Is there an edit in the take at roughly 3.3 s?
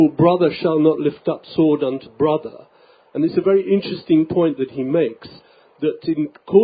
yes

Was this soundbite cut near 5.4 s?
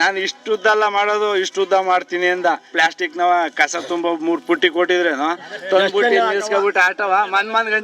no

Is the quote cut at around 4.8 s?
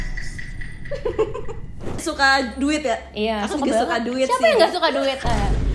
no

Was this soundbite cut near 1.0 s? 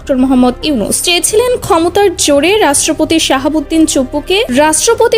yes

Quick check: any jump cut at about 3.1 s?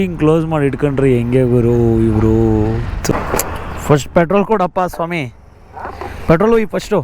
yes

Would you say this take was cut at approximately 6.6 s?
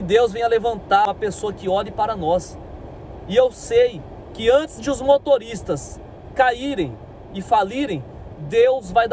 no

